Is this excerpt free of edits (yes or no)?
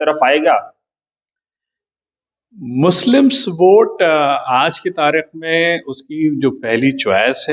yes